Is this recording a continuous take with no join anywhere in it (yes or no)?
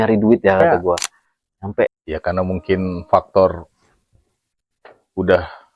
no